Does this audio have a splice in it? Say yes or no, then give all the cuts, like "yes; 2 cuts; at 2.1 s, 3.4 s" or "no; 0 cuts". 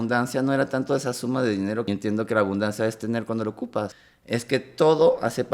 yes; 2 cuts; at 1.9 s, 3.9 s